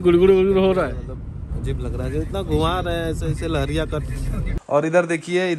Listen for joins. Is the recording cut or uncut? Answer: cut